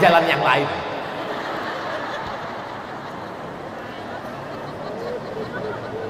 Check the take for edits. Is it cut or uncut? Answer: uncut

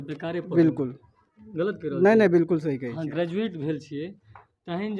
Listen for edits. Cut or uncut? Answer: uncut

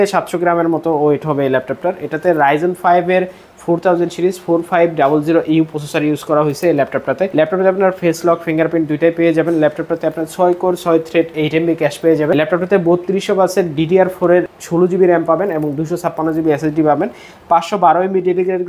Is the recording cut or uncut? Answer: cut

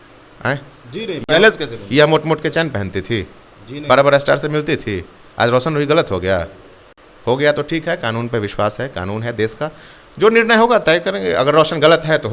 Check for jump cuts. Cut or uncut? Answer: uncut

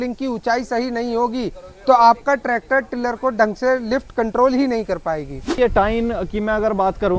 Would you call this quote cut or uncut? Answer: uncut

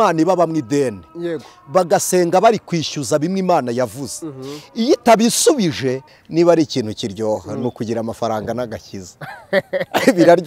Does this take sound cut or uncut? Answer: cut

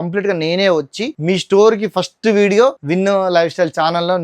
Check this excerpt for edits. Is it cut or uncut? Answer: cut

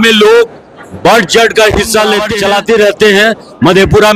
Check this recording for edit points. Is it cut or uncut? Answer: cut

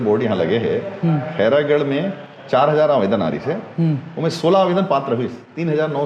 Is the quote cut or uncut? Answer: uncut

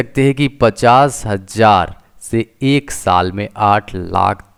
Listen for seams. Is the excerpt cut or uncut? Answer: uncut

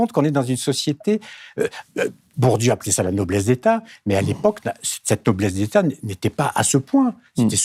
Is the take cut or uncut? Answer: uncut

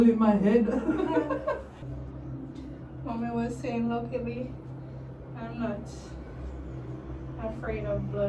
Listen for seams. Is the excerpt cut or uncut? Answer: cut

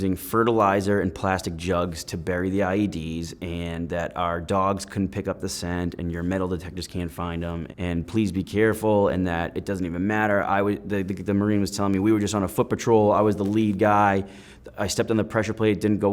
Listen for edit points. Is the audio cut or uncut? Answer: cut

